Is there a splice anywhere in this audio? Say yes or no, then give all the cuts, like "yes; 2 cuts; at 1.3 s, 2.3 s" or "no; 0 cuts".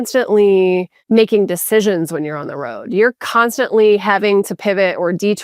yes; 1 cut; at 0.9 s